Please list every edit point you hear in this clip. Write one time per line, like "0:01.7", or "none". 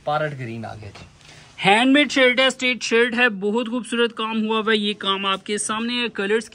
none